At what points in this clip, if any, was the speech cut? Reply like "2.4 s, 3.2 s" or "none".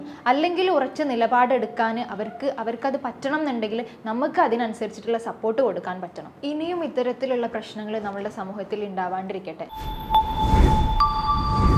9.7 s